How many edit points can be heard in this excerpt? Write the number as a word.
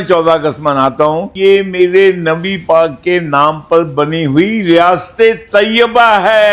one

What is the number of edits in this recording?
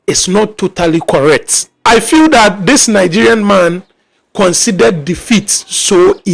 one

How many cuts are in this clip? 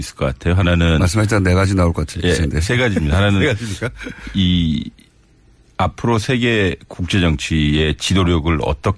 zero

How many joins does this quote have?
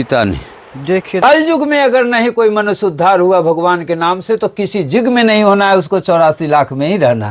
one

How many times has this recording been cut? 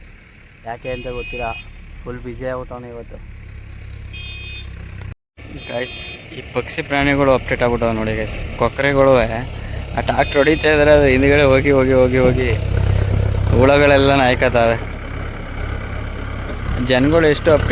zero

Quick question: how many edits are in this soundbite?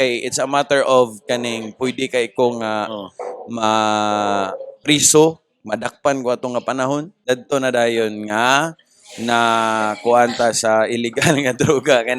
one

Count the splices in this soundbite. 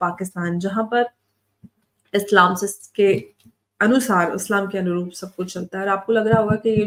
zero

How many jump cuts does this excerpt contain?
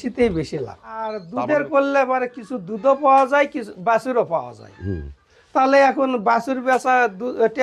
one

